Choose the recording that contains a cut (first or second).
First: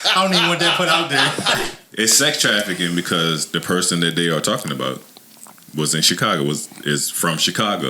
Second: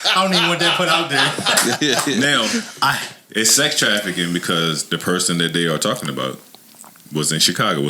first